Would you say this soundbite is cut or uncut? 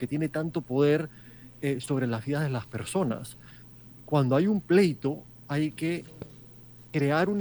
uncut